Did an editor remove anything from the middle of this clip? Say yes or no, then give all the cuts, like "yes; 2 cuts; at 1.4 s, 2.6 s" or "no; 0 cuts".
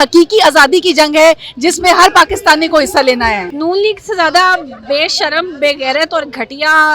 yes; 1 cut; at 3.5 s